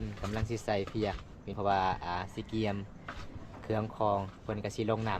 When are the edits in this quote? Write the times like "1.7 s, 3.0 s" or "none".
1.5 s